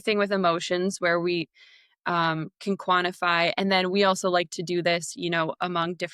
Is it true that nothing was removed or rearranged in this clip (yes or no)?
yes